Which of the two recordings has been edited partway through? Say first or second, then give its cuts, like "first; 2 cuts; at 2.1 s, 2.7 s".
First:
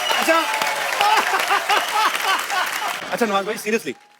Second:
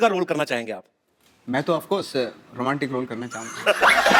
first; 1 cut; at 3.0 s